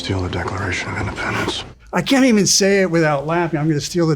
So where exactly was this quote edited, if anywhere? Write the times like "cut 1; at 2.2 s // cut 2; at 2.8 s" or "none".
cut 1; at 1.7 s

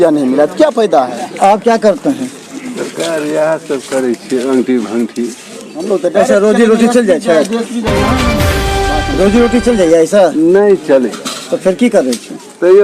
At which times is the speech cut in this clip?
none

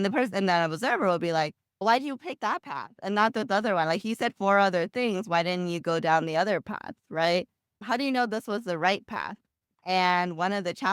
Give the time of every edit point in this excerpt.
cut 1; at 7.8 s

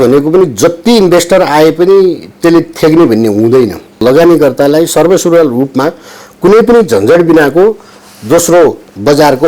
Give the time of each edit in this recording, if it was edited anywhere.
cut 1; at 4.0 s

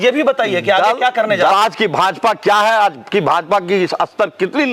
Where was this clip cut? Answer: cut 1; at 1.5 s

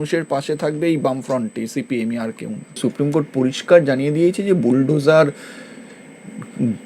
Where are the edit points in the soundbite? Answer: cut 1; at 2.8 s

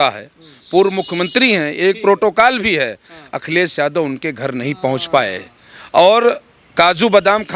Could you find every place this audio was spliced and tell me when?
none

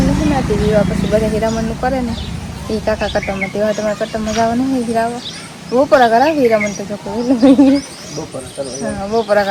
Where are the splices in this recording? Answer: none

